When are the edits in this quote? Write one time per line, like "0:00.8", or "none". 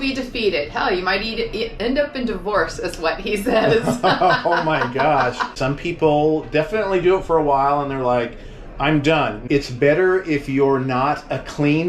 0:05.5
0:09.4